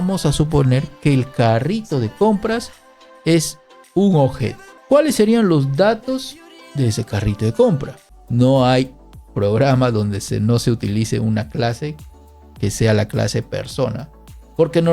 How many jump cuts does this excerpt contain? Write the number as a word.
one